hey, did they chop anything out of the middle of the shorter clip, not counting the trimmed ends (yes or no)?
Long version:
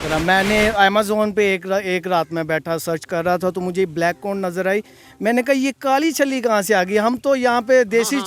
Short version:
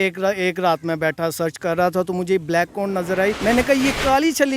yes